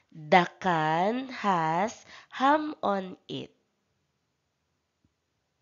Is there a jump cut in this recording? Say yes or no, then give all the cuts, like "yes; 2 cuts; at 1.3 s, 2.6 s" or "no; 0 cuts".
no; 0 cuts